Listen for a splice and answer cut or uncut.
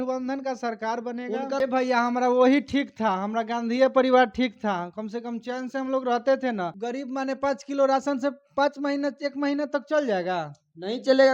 cut